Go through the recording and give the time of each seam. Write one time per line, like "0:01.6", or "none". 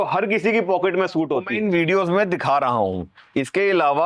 0:01.6